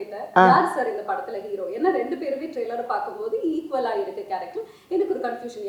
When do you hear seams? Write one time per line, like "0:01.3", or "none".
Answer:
none